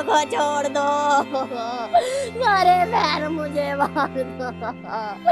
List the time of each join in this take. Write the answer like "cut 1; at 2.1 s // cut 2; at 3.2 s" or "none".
none